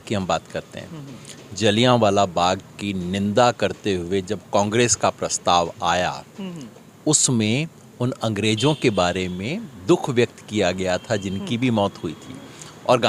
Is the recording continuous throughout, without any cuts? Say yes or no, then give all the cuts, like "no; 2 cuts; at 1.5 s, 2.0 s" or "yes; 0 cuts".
yes; 0 cuts